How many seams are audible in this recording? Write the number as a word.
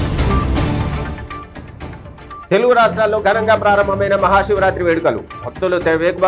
two